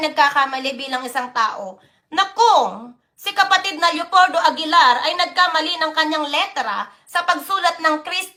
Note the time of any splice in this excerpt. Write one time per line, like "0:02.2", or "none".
none